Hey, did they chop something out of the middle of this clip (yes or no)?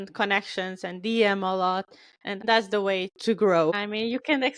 yes